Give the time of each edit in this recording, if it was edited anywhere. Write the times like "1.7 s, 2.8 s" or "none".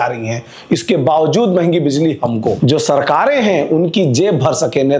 2.6 s